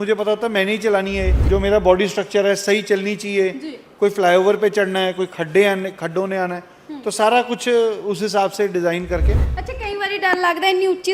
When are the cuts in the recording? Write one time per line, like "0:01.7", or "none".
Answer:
0:01.3